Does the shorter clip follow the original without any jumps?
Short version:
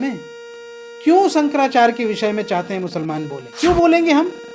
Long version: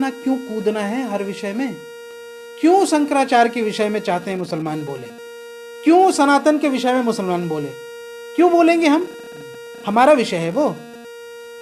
no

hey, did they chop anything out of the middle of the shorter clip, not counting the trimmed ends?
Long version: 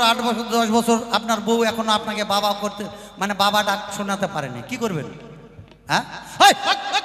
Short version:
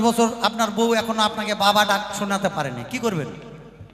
yes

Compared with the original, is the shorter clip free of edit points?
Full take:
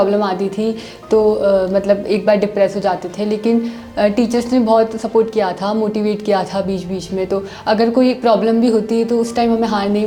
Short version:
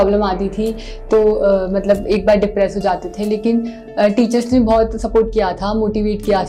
yes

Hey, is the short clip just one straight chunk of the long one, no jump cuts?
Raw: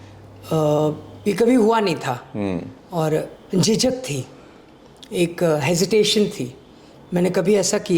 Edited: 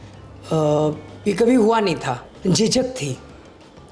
no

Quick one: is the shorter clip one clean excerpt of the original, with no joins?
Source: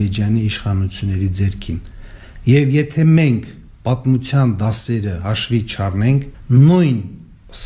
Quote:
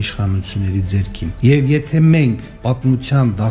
no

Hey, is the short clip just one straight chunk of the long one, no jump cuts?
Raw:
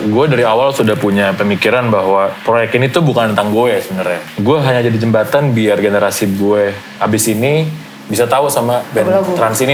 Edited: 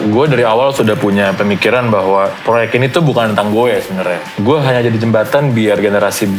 yes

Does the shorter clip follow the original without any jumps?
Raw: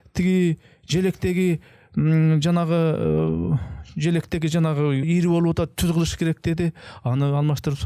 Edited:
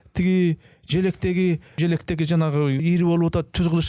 no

